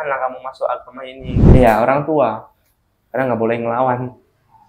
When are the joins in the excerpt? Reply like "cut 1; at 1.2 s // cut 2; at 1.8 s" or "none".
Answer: cut 1; at 1.4 s